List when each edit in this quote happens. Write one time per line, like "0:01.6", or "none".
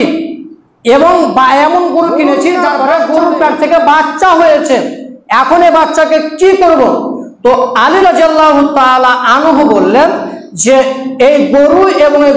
0:02.6